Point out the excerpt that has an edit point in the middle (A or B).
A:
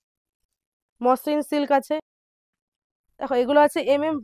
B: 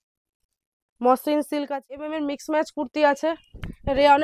B